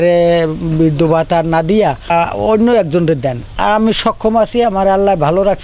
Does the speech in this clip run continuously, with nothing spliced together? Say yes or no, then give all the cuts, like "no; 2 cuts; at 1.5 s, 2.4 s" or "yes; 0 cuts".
no; 2 cuts; at 2.1 s, 3.4 s